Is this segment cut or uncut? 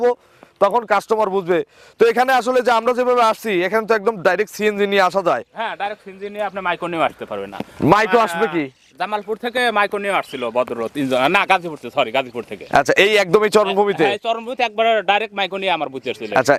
uncut